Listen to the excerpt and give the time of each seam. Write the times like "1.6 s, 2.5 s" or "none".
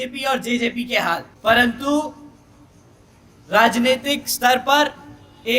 1.3 s